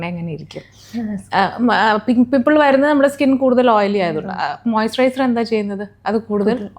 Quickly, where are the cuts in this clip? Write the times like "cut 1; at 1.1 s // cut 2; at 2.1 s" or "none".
none